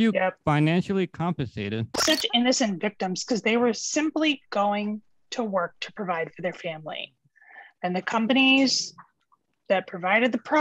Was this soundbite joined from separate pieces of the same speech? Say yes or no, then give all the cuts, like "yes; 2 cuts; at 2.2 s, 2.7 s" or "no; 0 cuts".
yes; 1 cut; at 1.9 s